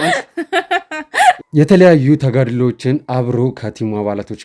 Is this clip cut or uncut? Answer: cut